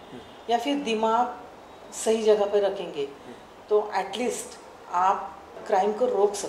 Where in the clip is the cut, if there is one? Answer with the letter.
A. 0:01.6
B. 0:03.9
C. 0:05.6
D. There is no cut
C